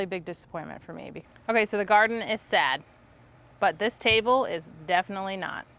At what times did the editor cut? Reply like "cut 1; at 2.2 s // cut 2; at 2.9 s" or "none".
cut 1; at 1.2 s